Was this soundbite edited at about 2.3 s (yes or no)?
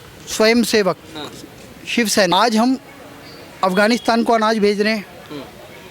yes